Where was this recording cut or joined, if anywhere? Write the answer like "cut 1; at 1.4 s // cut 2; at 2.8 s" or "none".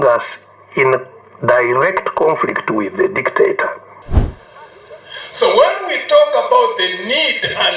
cut 1; at 4.0 s